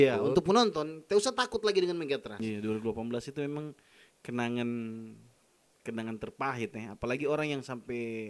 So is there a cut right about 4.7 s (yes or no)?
no